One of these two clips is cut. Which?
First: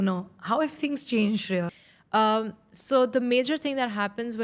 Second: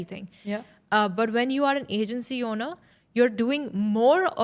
first; 1 cut; at 1.7 s

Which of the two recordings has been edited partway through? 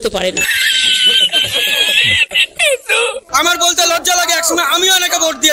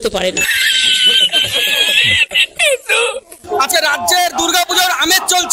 first; 1 cut; at 3.2 s

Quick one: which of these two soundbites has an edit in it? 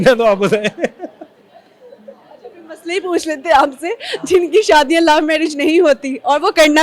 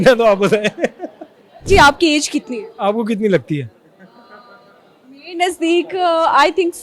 second; 1 cut; at 1.7 s

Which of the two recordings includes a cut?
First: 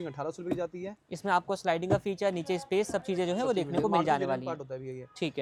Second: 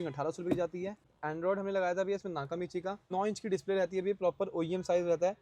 second; 2 cuts; at 1.1 s, 3.1 s

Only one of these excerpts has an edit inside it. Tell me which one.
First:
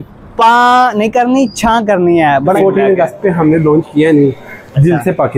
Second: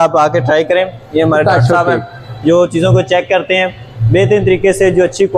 first; 1 cut; at 2.5 s

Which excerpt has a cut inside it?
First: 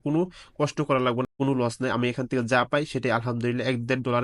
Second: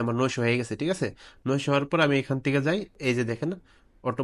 first; 1 cut; at 1.3 s

